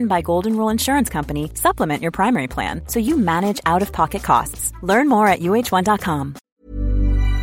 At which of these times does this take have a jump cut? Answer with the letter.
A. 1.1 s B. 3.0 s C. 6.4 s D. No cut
C